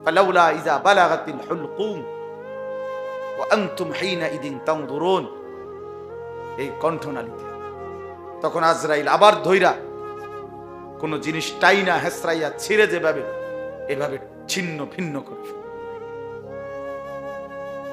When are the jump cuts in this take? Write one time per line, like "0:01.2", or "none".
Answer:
0:15.3
0:17.0